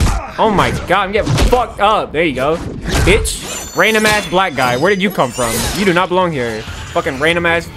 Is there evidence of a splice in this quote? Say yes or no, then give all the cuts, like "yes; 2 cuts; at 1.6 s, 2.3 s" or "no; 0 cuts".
no; 0 cuts